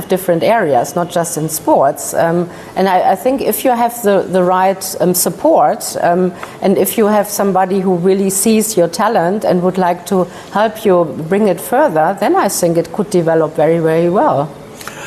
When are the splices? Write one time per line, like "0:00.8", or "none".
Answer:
none